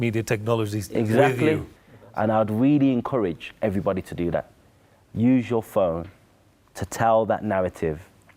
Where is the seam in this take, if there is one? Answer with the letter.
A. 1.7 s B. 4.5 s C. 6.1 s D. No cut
A